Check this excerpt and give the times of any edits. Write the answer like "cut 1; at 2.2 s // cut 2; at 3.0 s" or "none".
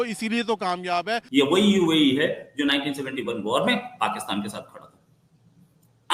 cut 1; at 1.2 s

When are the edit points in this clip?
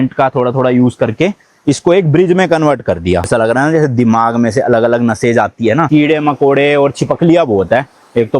cut 1; at 3.3 s // cut 2; at 5.9 s

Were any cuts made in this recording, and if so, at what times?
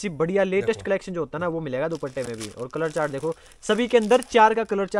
none

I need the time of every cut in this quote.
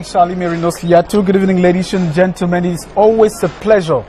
none

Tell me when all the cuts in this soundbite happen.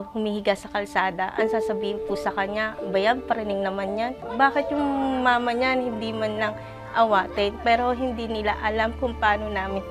cut 1; at 4.2 s

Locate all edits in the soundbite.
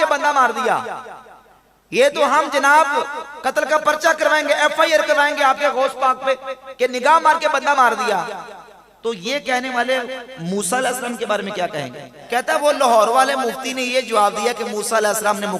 cut 1; at 12.1 s

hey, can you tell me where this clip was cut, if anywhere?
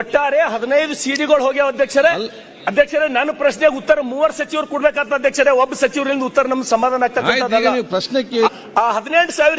cut 1; at 8.5 s

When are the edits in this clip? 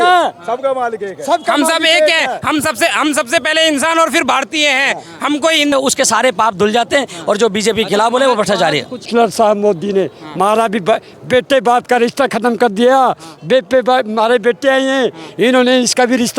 cut 1; at 5.7 s // cut 2; at 9.1 s

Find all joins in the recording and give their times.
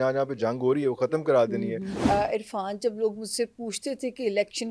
cut 1; at 1.9 s

